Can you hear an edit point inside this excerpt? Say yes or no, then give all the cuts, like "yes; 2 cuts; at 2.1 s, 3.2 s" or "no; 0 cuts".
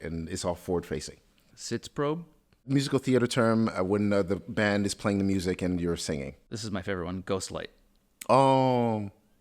yes; 3 cuts; at 1.5 s, 2.7 s, 6.5 s